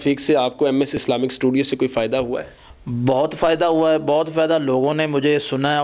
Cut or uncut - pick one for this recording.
uncut